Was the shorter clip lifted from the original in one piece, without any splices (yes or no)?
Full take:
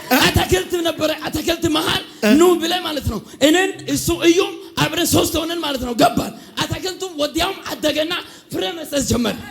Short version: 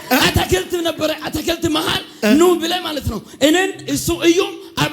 yes